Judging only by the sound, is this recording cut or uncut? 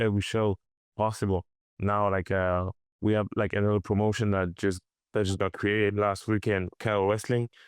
uncut